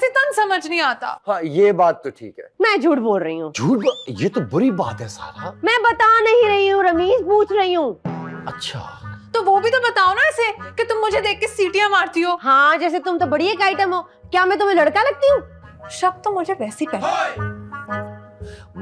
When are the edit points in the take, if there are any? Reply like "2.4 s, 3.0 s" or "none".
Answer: none